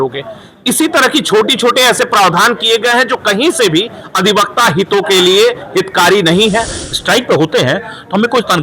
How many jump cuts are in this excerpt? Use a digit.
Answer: 1